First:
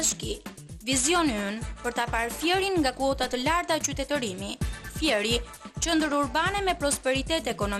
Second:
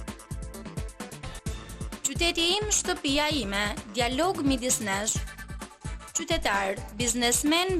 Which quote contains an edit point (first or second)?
second